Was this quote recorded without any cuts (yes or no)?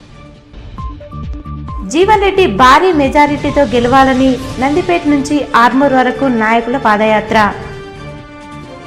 yes